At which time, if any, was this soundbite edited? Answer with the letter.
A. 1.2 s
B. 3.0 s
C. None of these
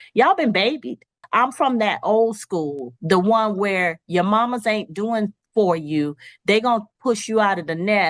A